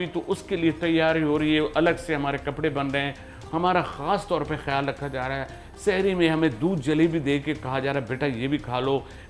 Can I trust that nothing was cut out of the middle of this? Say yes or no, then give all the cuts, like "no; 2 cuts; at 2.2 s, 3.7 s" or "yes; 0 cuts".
yes; 0 cuts